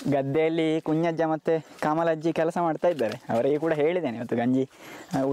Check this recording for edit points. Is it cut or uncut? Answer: uncut